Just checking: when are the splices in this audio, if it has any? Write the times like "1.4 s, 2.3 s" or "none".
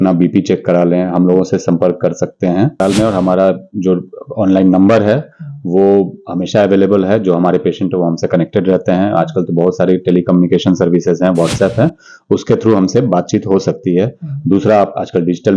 2.8 s